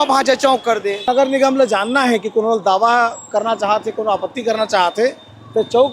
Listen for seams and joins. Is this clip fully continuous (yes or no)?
no